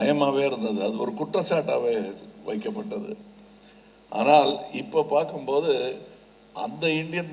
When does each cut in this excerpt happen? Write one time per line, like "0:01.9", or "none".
none